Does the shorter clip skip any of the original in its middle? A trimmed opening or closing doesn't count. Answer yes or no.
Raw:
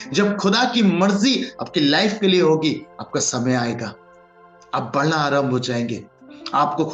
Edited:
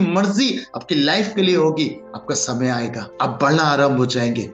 yes